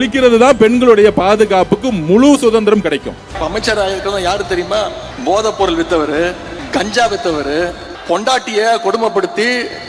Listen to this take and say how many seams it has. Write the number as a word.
four